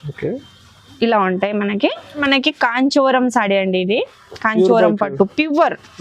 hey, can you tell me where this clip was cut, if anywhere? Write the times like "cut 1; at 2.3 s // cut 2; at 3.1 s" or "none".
cut 1; at 2.2 s